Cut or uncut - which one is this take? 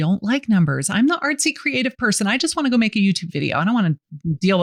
uncut